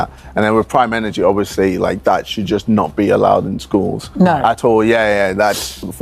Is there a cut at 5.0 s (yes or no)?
no